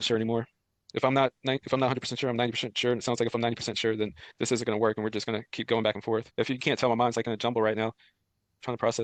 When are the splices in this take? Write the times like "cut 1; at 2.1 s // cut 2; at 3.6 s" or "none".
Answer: none